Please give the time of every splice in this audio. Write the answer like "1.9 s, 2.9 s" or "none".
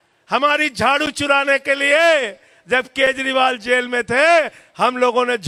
none